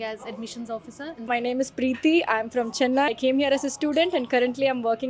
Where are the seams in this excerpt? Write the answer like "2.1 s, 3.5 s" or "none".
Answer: 1.3 s, 3.1 s